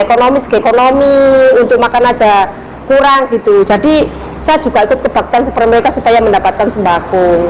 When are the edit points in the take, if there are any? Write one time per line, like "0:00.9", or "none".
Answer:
none